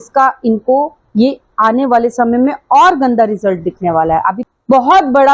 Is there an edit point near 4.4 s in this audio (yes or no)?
yes